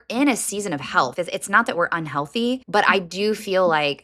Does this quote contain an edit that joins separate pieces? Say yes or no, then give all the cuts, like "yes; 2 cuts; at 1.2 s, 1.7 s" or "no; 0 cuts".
yes; 2 cuts; at 1.1 s, 2.6 s